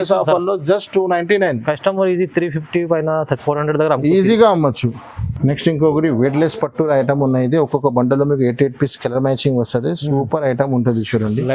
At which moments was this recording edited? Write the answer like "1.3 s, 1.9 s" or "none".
none

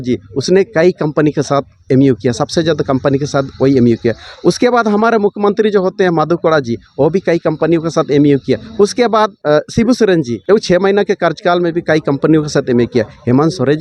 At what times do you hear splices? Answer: 9.4 s, 10.3 s

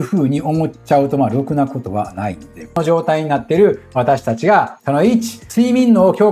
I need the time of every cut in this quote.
2.8 s

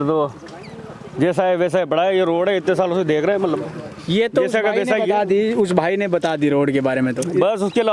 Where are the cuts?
none

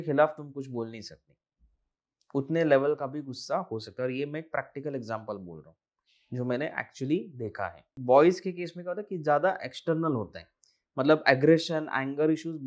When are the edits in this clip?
7.9 s

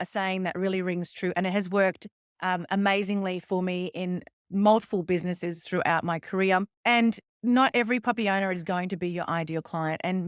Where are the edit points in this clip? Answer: 6.7 s

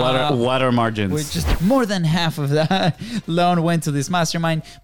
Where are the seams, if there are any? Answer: 1.4 s

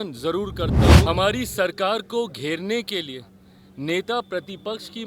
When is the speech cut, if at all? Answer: 1.0 s

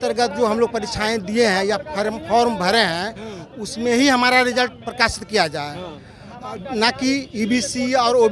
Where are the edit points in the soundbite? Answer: none

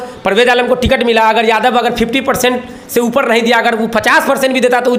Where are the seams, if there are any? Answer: none

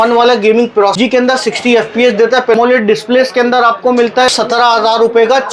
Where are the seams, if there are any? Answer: 1.0 s, 2.5 s, 4.3 s

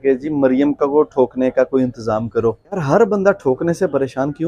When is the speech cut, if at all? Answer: 2.8 s

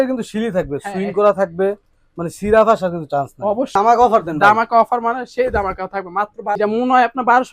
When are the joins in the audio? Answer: 3.7 s, 6.6 s

